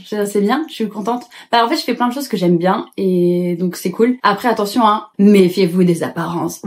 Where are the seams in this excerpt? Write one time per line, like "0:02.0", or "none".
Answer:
none

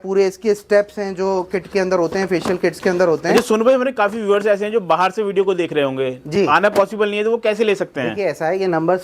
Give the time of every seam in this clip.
none

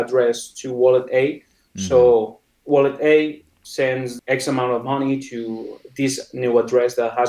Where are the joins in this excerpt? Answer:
0:04.1

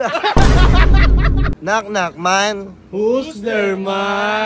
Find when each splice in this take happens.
0:01.5

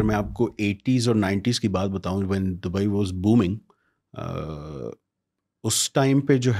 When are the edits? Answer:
none

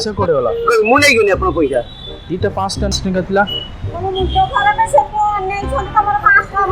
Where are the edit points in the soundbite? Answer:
0:02.9

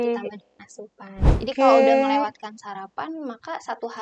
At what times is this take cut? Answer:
0:01.4

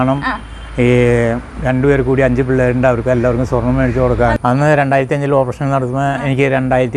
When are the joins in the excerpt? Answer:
0:04.3

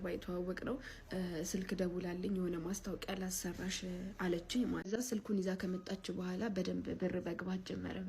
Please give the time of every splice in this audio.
0:04.9

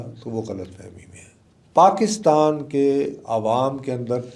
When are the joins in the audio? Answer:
none

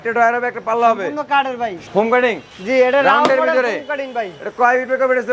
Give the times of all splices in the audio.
0:01.8

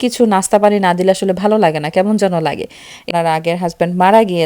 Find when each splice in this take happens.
0:03.1

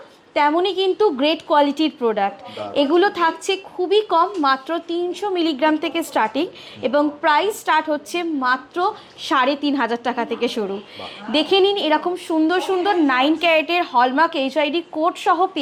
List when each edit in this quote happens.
none

